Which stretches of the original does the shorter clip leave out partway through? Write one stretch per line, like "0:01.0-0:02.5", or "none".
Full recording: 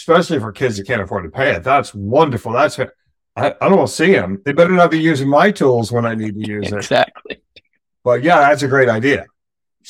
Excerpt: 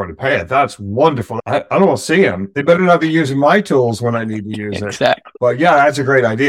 0:02.4-0:03.2
0:07.2-0:07.9